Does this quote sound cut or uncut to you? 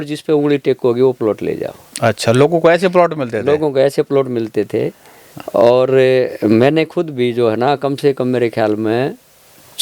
uncut